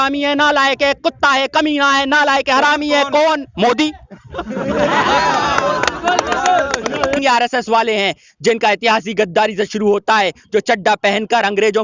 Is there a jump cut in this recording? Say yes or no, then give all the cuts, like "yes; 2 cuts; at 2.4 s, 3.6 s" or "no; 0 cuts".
yes; 1 cut; at 7.2 s